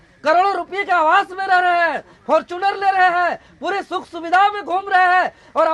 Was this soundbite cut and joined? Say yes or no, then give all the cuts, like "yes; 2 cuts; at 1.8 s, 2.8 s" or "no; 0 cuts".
no; 0 cuts